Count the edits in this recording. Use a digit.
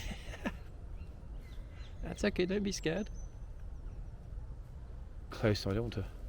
1